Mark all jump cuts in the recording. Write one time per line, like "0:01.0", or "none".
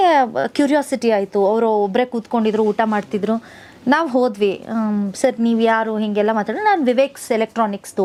none